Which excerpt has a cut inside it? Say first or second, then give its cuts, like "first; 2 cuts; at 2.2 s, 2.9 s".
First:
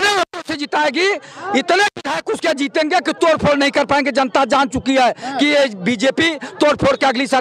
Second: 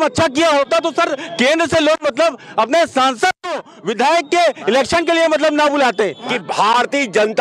second; 1 cut; at 6.3 s